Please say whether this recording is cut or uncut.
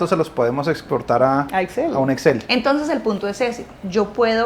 uncut